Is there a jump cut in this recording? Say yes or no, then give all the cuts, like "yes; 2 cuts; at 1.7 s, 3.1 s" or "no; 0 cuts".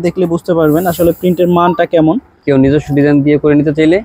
yes; 1 cut; at 2.4 s